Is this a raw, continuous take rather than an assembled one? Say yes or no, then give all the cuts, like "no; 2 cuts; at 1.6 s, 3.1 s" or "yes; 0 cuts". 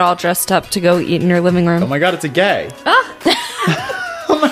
no; 1 cut; at 1.9 s